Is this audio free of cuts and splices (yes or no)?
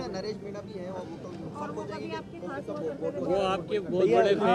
yes